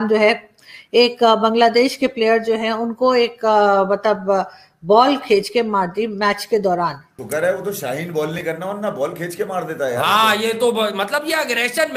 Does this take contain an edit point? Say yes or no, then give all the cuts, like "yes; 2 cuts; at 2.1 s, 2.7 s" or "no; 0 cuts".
yes; 1 cut; at 7.2 s